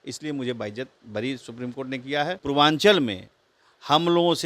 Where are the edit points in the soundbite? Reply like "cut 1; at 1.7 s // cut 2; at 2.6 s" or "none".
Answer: cut 1; at 2.4 s